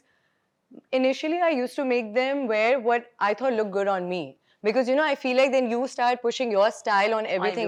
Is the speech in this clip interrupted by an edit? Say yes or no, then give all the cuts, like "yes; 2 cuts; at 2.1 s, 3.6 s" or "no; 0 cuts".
no; 0 cuts